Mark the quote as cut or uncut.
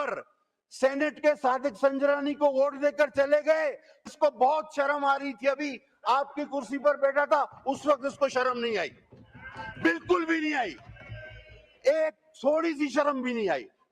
cut